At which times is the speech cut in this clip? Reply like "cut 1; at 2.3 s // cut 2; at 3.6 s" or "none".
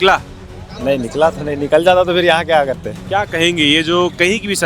cut 1; at 2.9 s